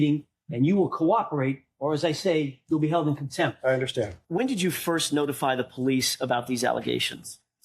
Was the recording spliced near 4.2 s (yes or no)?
yes